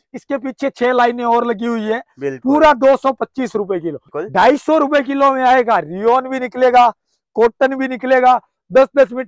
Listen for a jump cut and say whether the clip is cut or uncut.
cut